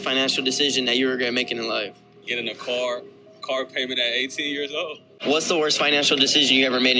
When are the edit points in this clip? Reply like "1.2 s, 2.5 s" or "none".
5.1 s

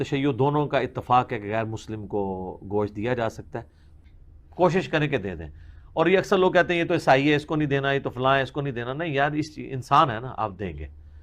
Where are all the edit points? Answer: 3.8 s

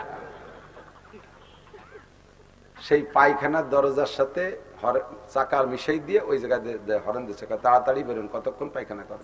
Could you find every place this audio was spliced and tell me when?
none

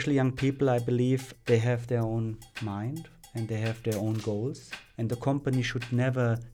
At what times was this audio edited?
1.3 s, 2.5 s, 3.4 s, 5.1 s

